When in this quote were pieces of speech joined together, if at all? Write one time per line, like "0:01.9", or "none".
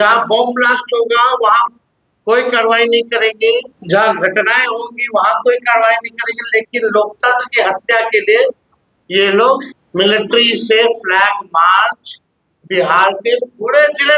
0:03.8
0:09.8